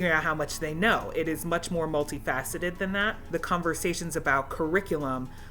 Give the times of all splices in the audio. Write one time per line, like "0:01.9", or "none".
0:03.2